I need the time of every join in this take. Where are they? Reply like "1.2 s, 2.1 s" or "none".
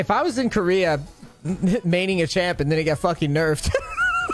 none